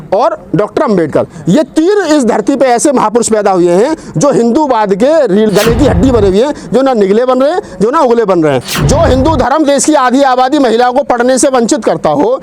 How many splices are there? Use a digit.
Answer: 1